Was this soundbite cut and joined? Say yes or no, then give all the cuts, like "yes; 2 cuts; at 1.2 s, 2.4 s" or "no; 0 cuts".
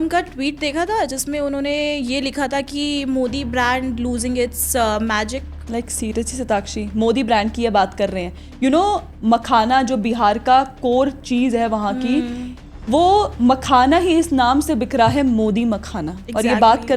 no; 0 cuts